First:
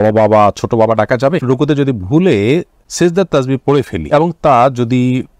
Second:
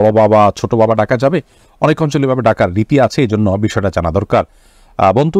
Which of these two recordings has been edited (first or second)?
first